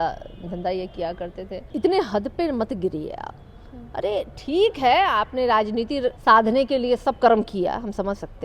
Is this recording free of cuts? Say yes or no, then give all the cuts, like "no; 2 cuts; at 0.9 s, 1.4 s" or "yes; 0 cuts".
no; 2 cuts; at 1.7 s, 6.2 s